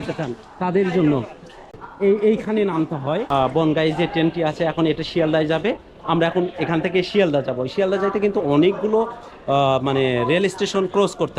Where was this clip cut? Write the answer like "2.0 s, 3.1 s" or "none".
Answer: 1.8 s, 3.3 s